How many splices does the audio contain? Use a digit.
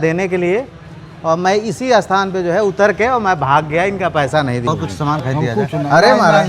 1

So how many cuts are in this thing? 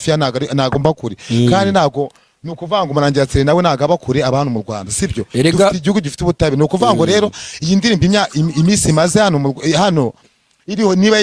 0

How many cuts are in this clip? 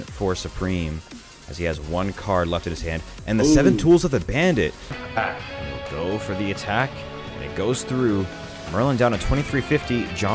1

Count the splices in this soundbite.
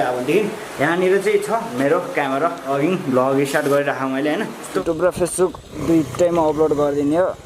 1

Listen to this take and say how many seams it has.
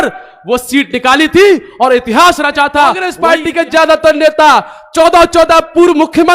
1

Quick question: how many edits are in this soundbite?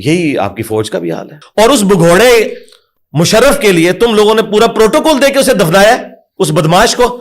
1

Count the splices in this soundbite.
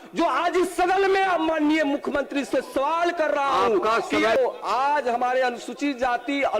1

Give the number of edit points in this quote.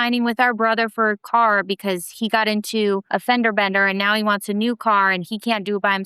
1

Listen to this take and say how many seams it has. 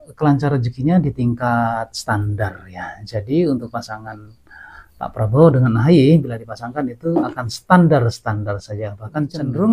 0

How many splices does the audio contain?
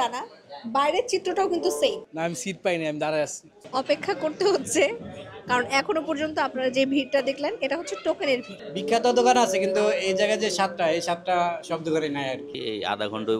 4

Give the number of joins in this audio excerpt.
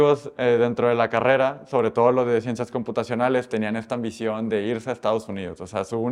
0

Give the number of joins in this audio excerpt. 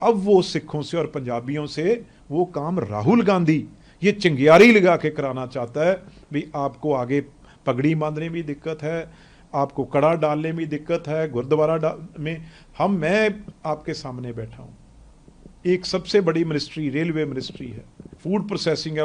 0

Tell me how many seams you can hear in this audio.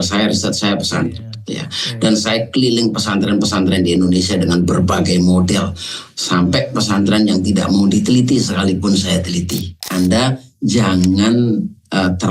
1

